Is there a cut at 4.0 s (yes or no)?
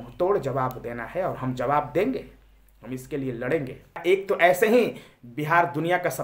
yes